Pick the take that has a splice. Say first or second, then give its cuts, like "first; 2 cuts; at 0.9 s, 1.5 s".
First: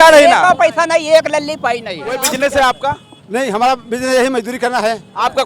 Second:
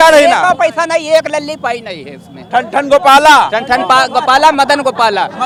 first; 1 cut; at 2.1 s